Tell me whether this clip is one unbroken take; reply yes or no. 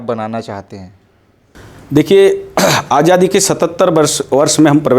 yes